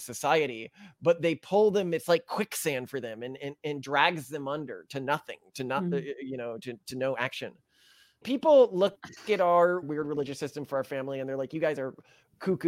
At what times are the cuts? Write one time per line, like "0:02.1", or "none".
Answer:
0:08.3
0:09.9